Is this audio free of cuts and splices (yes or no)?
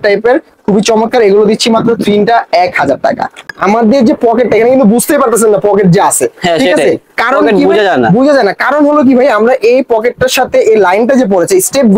no